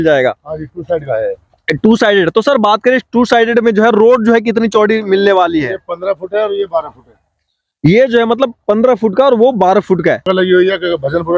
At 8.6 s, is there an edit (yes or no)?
no